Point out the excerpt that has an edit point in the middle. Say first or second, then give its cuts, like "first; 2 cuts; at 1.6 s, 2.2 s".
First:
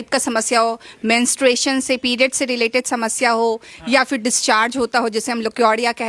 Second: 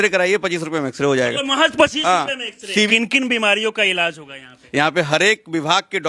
second; 2 cuts; at 2.4 s, 4.5 s